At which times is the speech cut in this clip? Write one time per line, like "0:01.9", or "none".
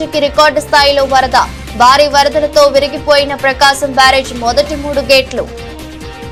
none